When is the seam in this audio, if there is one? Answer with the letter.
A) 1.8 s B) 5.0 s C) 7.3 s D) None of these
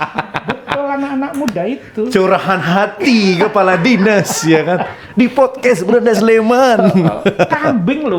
D